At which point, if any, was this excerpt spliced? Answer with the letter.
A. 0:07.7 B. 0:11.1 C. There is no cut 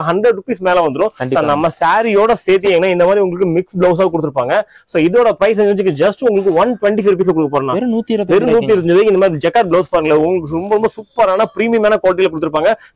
C